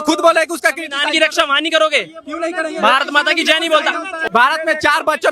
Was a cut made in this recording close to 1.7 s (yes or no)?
no